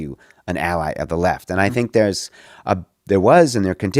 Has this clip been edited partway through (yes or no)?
no